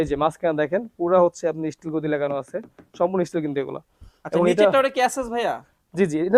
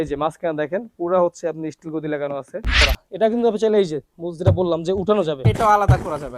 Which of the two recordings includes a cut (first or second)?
second